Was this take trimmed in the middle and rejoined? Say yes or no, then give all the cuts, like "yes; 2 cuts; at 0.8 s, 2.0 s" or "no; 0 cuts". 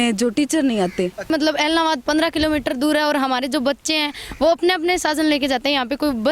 yes; 1 cut; at 1.3 s